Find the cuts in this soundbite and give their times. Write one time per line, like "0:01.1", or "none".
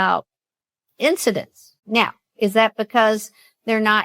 0:01.7